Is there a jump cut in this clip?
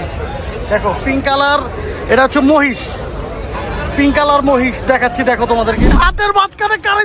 yes; 1 cut; at 5.8 s

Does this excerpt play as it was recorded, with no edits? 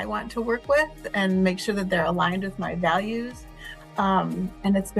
yes; 0 cuts

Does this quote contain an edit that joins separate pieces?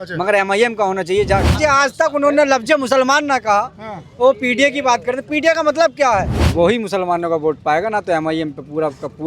yes; 2 cuts; at 1.5 s, 6.4 s

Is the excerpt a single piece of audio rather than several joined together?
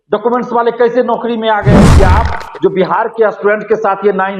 no; 1 cut; at 1.9 s

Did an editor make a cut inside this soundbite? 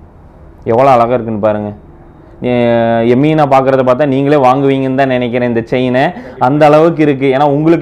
no; 0 cuts

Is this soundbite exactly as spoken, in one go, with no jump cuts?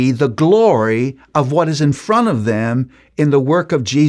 yes; 0 cuts

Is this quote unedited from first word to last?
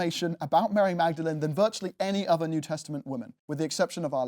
no; 1 cut; at 3.4 s

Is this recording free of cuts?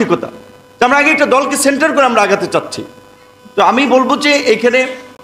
yes; 0 cuts

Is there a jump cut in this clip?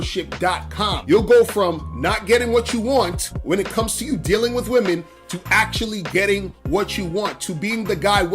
yes; 1 cut; at 1.0 s

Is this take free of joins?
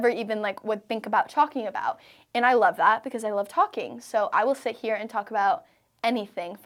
yes; 0 cuts

